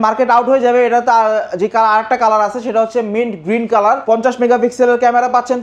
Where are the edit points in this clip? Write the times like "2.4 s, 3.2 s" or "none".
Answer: 4.0 s